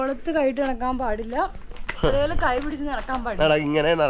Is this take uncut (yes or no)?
yes